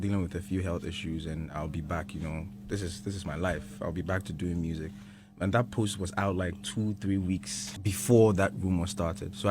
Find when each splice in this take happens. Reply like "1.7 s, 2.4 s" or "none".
7.6 s